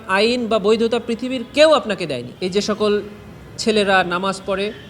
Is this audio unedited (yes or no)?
no